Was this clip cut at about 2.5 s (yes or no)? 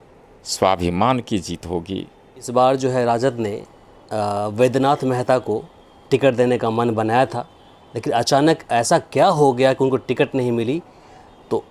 yes